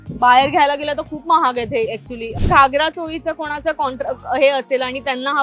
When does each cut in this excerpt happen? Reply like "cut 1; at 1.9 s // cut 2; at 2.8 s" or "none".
cut 1; at 2.3 s